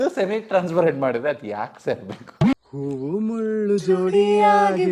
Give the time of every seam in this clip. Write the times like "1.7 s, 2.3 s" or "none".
2.5 s